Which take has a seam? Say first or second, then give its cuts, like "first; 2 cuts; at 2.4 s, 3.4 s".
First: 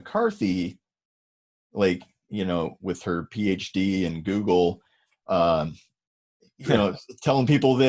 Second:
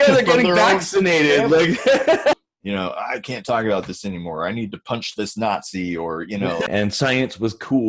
second; 2 cuts; at 2.4 s, 6.7 s